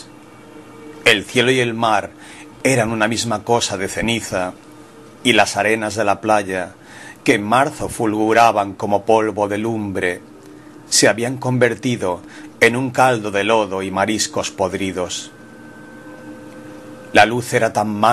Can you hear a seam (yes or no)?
no